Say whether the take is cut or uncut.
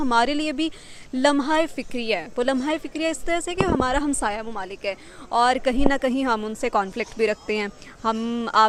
uncut